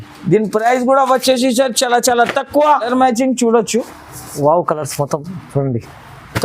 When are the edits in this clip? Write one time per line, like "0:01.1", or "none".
0:02.9

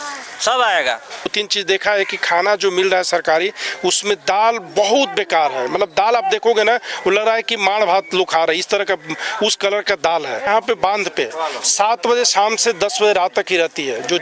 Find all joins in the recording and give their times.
0:01.3
0:10.5

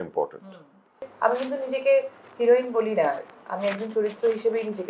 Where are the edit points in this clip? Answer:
0:01.1

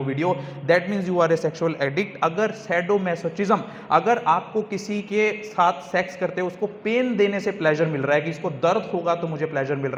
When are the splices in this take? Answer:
none

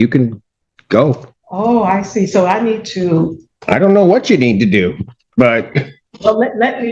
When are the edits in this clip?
0:01.3
0:06.0

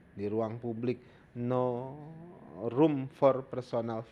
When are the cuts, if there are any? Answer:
none

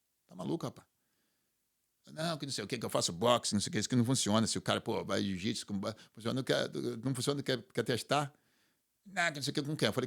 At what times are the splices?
none

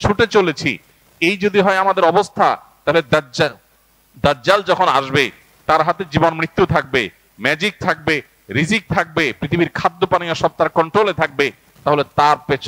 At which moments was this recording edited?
none

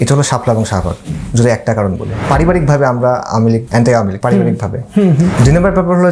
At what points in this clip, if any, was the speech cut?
0:02.2
0:03.9
0:05.4

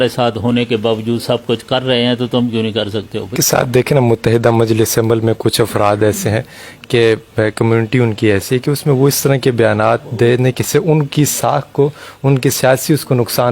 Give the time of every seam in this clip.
0:03.3

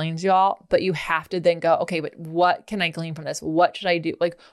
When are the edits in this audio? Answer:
none

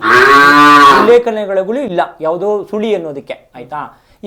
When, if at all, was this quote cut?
none

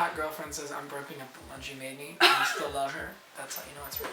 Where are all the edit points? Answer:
none

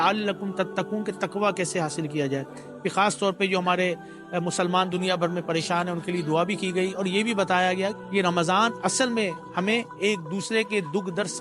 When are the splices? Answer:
0:07.9

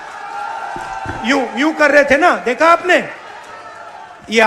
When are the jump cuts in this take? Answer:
none

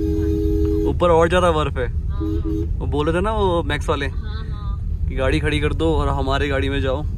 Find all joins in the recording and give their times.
none

